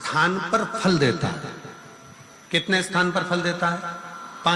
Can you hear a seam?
no; 0 cuts

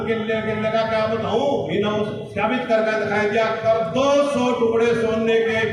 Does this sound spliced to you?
no; 0 cuts

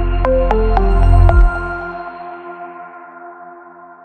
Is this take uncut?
yes; 0 cuts

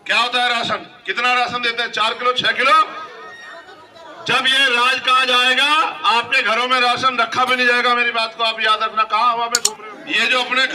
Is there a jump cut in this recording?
yes; 1 cut; at 9.6 s

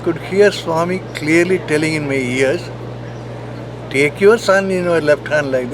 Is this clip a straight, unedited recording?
yes; 0 cuts

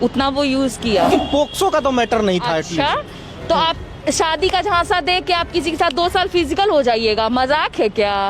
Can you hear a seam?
yes; 1 cut; at 1.1 s

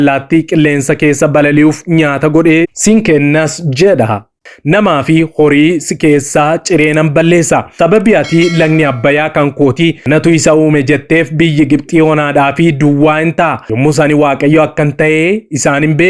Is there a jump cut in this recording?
yes; 4 cuts; at 4.3 s, 7.7 s, 10.0 s, 13.6 s

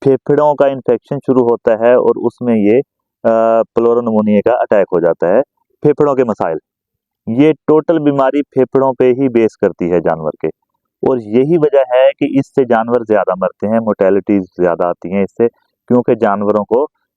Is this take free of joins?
yes; 0 cuts

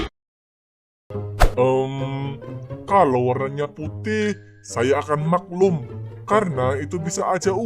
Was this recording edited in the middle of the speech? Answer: yes; 1 cut; at 1.0 s

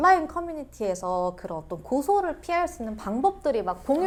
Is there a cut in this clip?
no; 0 cuts

